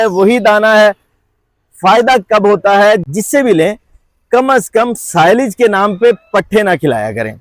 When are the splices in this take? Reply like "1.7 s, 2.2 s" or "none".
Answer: 3.0 s

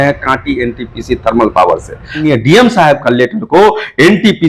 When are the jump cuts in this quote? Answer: 2.2 s

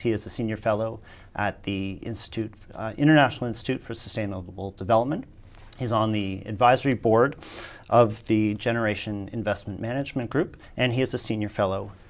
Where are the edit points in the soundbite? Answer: none

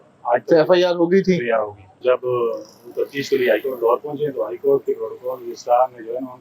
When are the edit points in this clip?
1.9 s

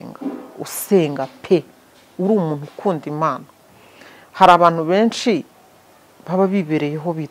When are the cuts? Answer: none

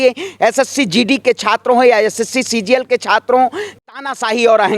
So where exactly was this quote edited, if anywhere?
3.8 s

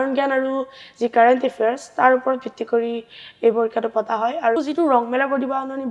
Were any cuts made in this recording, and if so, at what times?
4.6 s

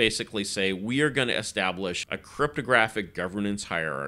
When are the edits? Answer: 2.1 s

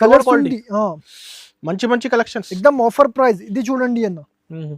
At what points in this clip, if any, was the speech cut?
1.1 s

